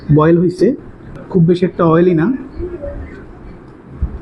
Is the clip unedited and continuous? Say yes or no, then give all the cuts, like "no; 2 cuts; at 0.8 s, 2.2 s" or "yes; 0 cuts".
no; 1 cut; at 1.2 s